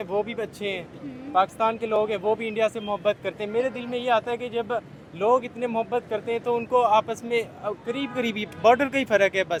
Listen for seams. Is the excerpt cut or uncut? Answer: uncut